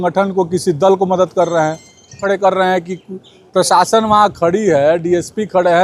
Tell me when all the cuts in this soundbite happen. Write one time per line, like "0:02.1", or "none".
0:02.2